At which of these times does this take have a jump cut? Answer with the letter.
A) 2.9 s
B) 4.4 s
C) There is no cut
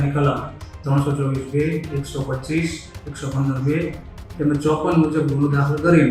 C